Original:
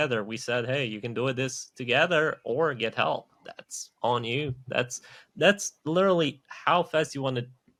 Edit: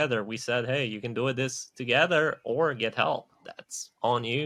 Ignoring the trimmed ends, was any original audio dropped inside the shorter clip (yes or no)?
no